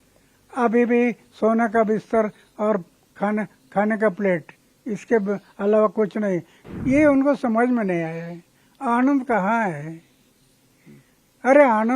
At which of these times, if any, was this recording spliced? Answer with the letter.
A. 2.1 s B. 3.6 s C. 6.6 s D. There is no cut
C